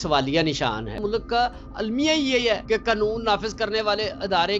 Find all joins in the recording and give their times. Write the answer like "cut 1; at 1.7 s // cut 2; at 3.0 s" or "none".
cut 1; at 1.0 s // cut 2; at 2.6 s